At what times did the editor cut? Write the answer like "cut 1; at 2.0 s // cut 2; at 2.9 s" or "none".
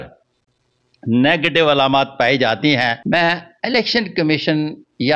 cut 1; at 3.0 s